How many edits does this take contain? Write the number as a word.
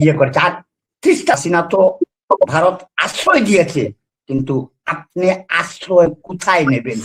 one